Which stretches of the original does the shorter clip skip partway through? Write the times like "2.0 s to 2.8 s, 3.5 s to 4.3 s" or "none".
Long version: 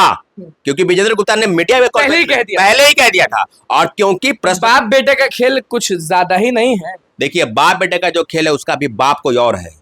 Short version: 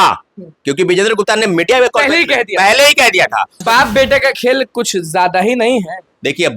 3.6 s to 4.6 s